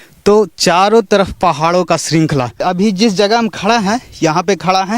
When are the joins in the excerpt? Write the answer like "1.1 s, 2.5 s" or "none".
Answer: 2.6 s